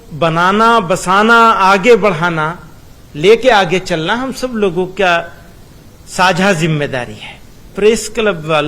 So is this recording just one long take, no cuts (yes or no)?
no